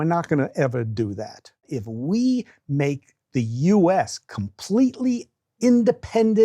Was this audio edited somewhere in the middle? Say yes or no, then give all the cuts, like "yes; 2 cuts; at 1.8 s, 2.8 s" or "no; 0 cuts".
yes; 1 cut; at 1.8 s